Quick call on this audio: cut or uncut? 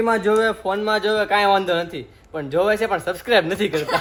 uncut